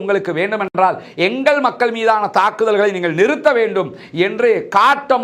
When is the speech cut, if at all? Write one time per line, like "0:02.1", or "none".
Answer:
none

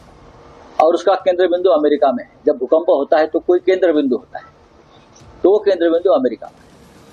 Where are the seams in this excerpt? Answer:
none

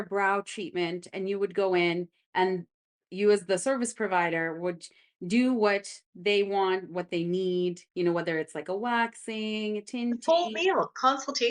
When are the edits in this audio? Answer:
0:03.0

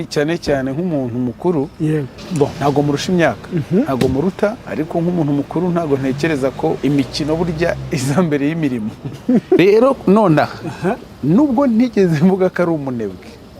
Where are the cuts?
0:02.2
0:04.6
0:06.8
0:09.6

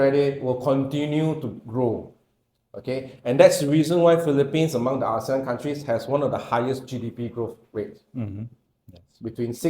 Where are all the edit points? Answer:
none

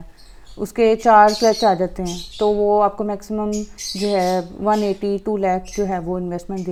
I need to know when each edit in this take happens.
none

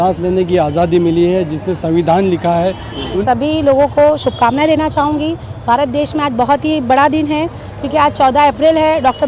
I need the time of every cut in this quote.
0:03.2

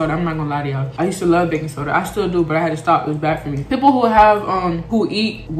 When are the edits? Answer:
none

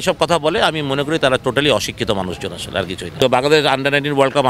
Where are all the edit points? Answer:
0:03.2

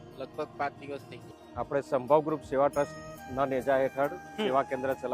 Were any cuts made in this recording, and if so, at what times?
0:01.2

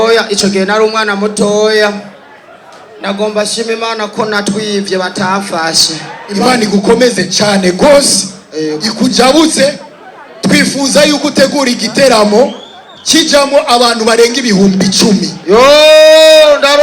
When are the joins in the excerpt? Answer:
0:06.2

